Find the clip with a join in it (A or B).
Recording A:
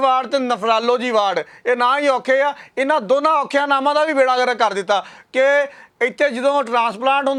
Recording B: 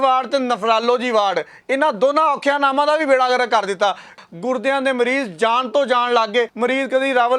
B